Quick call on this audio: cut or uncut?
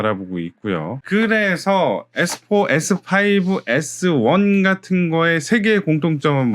cut